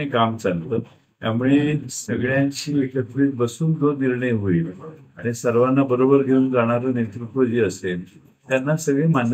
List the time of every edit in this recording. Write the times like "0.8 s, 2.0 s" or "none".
none